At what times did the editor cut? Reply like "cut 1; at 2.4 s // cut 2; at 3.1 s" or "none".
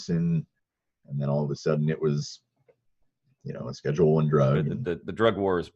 cut 1; at 4.7 s